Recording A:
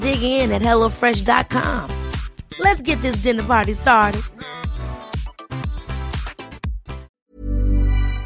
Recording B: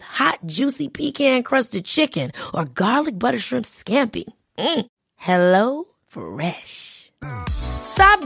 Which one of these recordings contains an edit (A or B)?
A